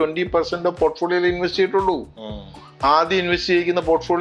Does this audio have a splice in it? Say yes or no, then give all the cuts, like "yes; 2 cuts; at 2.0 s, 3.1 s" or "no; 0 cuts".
no; 0 cuts